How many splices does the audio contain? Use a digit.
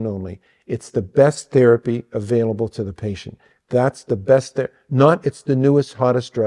0